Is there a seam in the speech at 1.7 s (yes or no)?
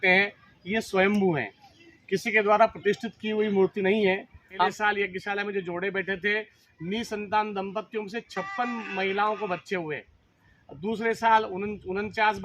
no